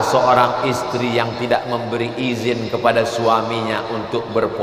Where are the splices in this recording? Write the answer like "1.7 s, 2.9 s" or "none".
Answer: none